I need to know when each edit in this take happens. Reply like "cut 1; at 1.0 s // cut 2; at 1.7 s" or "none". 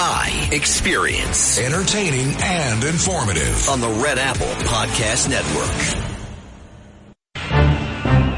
cut 1; at 7.3 s